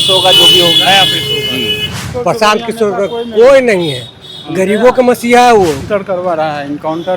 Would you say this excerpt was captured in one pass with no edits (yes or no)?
no